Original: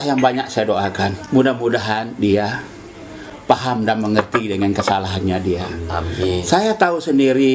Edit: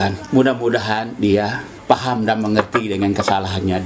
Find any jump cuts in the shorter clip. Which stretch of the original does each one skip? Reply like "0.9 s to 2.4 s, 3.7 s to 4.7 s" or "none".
2.7 s to 3.3 s